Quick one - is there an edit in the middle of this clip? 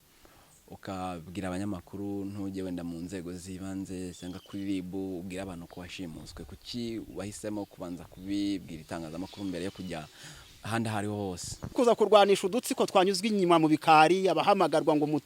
yes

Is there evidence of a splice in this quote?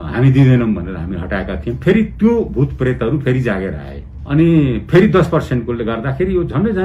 no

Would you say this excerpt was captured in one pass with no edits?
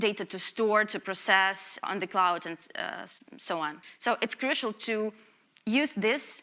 no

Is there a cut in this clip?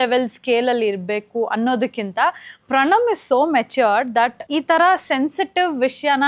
yes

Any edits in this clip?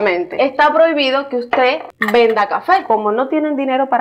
yes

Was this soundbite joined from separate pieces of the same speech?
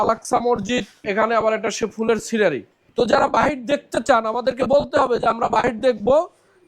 yes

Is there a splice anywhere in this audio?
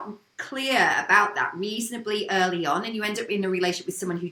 no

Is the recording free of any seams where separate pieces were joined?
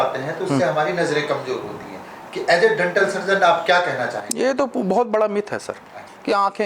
yes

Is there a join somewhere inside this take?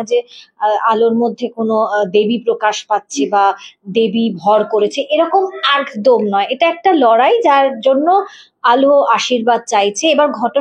no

